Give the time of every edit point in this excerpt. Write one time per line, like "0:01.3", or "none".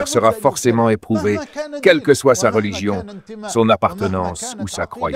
none